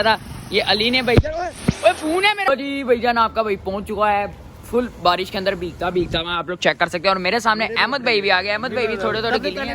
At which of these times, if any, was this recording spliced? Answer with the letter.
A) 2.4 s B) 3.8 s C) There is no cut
A